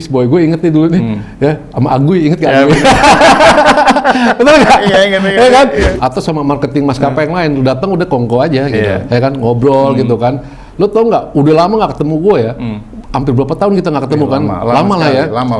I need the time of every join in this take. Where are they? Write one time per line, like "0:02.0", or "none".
0:05.9